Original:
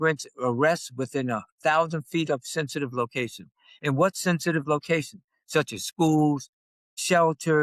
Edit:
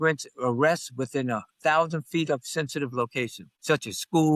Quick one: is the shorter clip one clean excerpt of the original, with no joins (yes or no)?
no